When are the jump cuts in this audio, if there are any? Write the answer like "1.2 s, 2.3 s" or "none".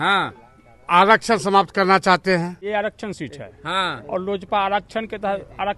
2.7 s